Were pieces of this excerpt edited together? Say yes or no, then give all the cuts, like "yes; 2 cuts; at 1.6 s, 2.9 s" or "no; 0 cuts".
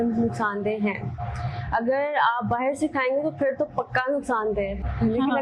no; 0 cuts